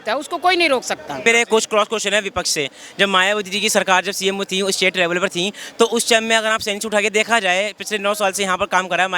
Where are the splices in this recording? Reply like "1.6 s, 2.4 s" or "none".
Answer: 1.2 s

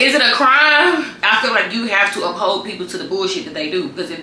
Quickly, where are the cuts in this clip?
1.2 s

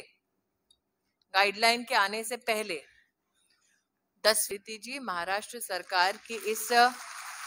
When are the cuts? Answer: 4.5 s

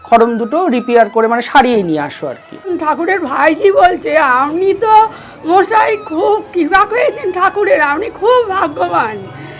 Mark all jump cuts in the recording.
2.7 s

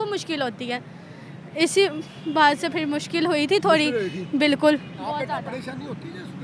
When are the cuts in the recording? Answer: none

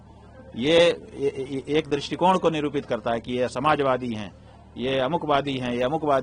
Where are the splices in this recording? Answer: none

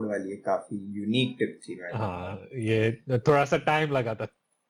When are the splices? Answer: none

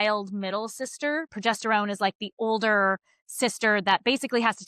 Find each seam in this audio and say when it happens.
1.3 s

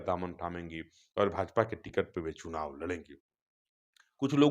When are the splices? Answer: none

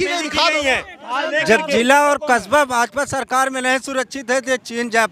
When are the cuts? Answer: 1.1 s

